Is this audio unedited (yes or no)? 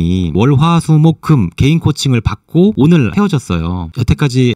yes